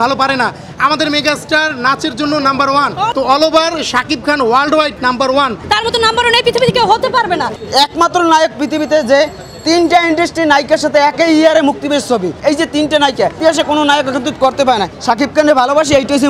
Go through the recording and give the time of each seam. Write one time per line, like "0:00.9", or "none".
0:03.1
0:05.6
0:07.5
0:12.4
0:13.4
0:14.9

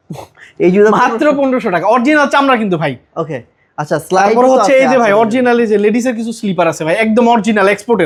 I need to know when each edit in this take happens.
none

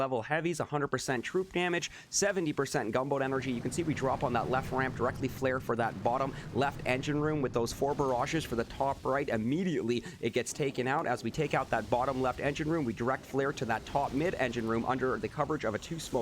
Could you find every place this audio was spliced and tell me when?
none

